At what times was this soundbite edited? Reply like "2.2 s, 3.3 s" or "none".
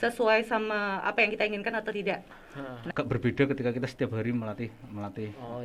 2.9 s

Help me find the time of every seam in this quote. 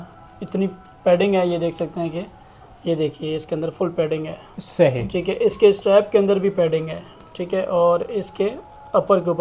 none

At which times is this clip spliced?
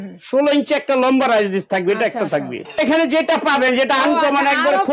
2.8 s

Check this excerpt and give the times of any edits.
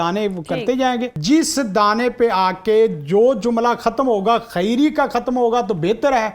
1.1 s

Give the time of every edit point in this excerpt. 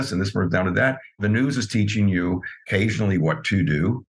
1.2 s, 2.5 s

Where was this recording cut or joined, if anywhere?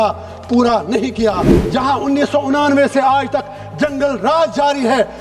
1.5 s

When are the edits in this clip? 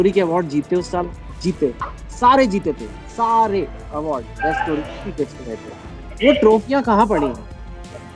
none

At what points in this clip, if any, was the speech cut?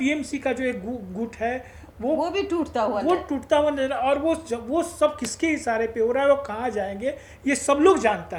none

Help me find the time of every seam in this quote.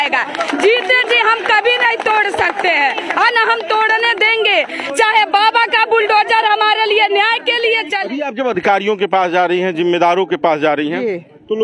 8.0 s

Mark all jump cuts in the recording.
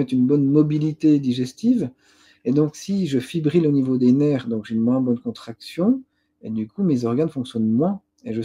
none

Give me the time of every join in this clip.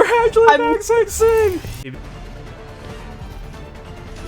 1.8 s

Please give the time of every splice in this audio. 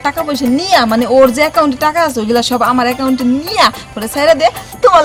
none

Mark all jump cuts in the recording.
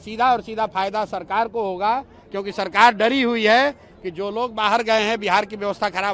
none

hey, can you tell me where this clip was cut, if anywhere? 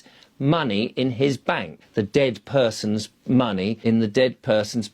1.8 s, 3.8 s

